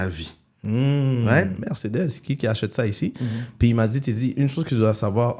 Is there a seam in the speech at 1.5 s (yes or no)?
yes